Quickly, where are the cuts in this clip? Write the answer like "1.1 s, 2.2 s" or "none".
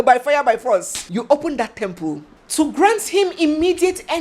2.3 s

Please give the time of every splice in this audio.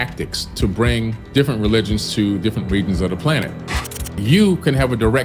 1.2 s, 4.2 s

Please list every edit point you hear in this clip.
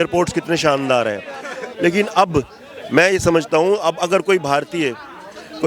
none

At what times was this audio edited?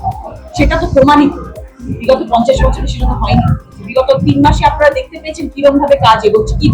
3.7 s

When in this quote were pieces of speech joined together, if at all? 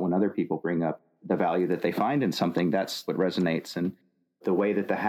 4.2 s

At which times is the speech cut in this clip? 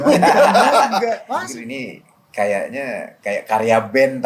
1.3 s

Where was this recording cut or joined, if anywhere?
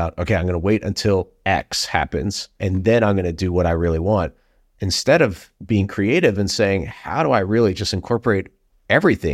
2.5 s

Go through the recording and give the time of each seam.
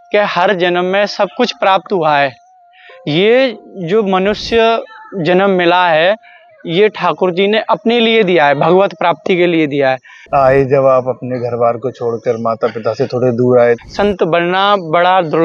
10.1 s, 13.8 s

